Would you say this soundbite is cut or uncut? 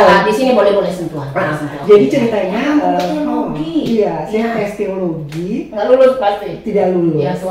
uncut